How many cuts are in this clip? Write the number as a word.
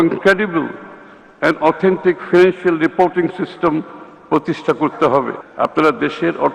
one